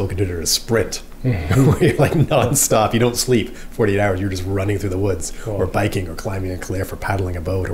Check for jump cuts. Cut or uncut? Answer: uncut